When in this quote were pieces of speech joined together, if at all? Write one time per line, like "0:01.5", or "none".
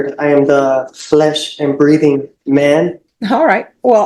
0:03.1